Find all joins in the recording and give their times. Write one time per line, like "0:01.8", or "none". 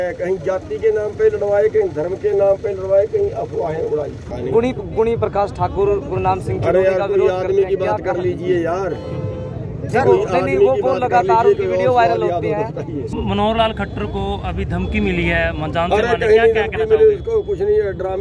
0:04.2
0:13.1